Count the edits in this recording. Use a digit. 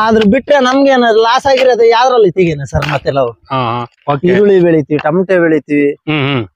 1